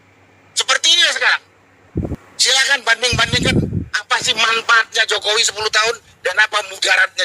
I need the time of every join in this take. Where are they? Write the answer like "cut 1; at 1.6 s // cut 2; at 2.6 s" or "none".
cut 1; at 2.1 s